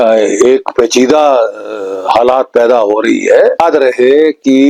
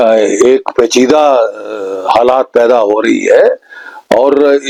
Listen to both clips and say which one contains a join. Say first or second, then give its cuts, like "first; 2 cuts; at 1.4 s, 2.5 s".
first; 1 cut; at 3.6 s